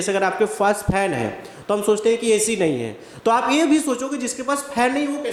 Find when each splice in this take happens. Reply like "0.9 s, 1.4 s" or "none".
none